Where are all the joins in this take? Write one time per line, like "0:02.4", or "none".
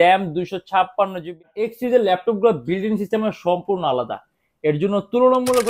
0:01.2